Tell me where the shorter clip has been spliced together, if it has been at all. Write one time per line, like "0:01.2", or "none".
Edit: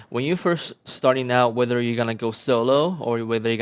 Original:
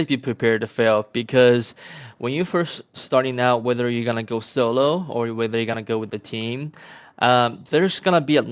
none